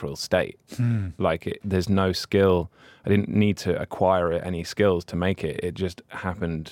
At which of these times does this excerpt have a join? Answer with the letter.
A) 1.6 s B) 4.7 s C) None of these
A